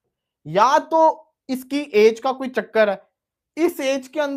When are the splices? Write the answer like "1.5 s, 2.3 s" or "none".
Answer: none